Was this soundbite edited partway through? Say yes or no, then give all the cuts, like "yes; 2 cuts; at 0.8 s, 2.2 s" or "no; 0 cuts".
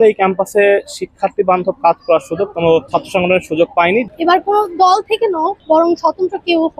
yes; 3 cuts; at 2.9 s, 4.1 s, 5.6 s